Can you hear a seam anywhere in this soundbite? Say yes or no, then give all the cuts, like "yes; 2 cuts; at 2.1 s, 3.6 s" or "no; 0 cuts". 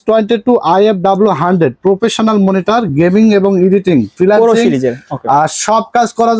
no; 0 cuts